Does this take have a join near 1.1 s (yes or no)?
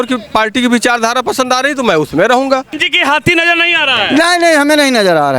no